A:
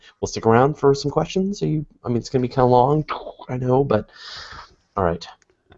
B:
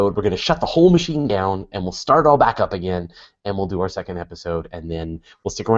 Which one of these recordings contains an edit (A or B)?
A